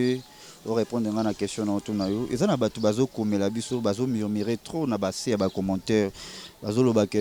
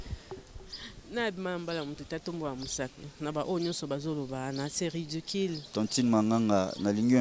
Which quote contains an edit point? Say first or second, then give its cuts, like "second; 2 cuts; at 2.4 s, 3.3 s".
second; 1 cut; at 5.6 s